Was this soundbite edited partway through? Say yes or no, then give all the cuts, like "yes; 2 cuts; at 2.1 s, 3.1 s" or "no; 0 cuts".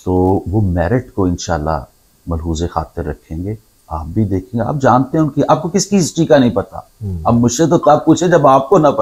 no; 0 cuts